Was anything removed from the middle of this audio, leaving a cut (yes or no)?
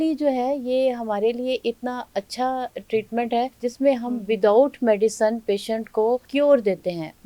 yes